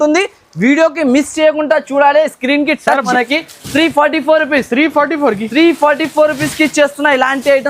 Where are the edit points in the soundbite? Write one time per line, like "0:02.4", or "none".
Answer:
0:03.1